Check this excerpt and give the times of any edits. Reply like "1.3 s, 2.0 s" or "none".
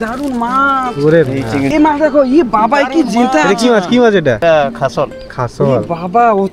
1.7 s, 4.4 s